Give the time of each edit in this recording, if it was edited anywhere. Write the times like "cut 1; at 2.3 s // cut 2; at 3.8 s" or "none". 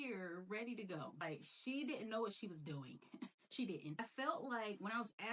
cut 1; at 1.1 s // cut 2; at 4.0 s